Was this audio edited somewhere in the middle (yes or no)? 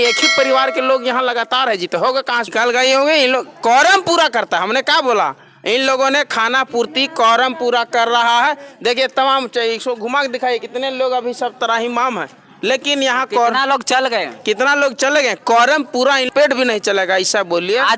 yes